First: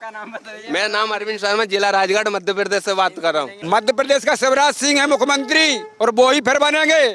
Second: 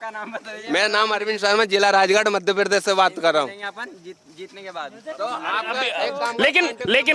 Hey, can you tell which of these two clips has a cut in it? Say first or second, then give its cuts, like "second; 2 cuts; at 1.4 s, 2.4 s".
first; 1 cut; at 3.6 s